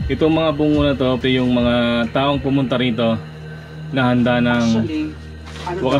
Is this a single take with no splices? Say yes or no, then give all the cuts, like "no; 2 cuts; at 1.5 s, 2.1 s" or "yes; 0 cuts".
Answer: no; 1 cut; at 1.2 s